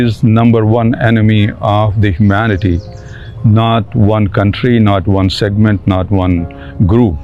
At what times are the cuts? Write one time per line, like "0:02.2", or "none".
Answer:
none